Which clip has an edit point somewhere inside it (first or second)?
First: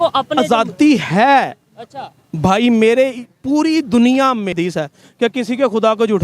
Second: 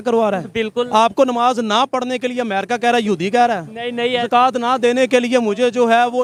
first